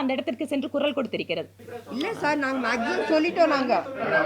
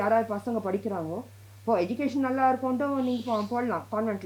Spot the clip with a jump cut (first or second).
first